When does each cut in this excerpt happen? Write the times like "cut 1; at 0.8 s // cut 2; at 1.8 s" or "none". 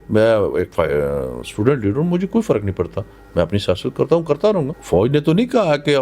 cut 1; at 4.8 s